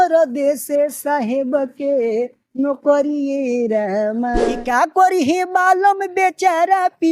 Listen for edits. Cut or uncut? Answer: cut